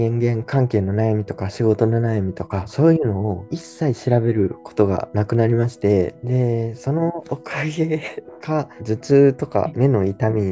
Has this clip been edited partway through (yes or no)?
no